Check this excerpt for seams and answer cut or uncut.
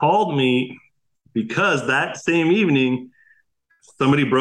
uncut